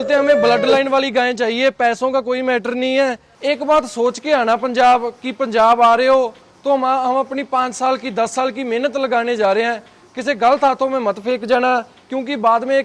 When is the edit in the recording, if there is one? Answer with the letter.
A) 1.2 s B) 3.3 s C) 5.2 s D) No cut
B